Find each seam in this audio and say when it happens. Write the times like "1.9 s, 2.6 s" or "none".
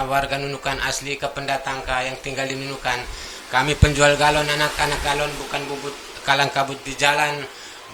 none